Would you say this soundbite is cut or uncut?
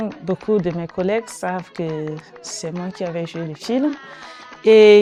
uncut